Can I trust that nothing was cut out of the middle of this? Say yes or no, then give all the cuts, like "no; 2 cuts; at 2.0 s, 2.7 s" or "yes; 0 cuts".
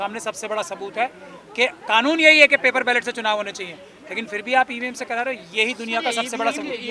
yes; 0 cuts